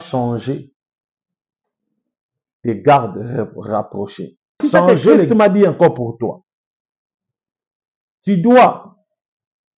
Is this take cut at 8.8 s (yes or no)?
no